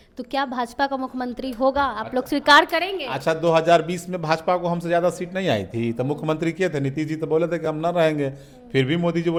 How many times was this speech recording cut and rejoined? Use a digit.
0